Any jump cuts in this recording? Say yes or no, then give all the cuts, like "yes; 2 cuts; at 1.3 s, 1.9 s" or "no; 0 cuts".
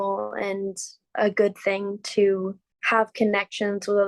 yes; 1 cut; at 2.7 s